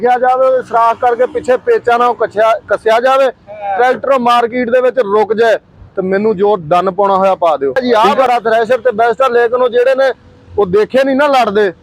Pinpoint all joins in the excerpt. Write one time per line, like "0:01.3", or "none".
0:07.8